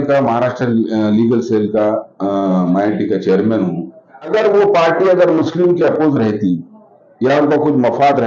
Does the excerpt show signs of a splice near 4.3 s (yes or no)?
yes